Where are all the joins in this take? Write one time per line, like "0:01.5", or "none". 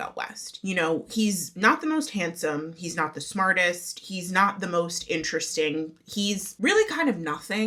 none